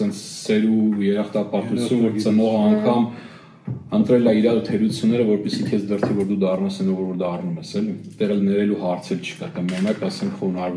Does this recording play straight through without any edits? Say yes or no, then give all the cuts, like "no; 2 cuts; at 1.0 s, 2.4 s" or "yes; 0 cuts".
yes; 0 cuts